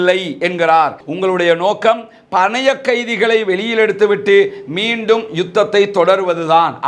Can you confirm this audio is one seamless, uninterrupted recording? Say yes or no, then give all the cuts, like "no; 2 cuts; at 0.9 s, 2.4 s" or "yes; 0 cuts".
no; 1 cut; at 1.0 s